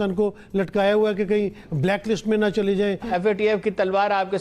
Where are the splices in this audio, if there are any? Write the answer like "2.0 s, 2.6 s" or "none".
3.1 s